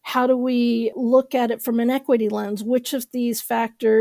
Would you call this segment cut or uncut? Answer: cut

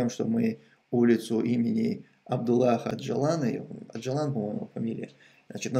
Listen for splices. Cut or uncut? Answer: cut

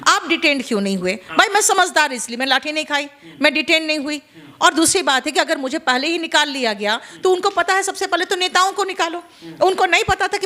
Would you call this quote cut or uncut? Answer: uncut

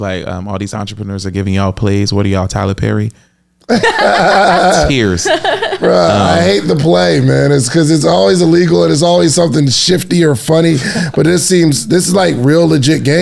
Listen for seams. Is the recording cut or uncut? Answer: uncut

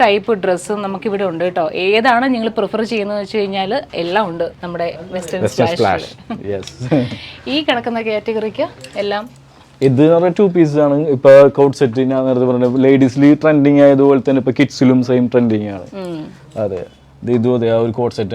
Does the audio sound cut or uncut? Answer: uncut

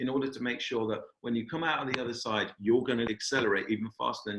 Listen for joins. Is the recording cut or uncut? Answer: cut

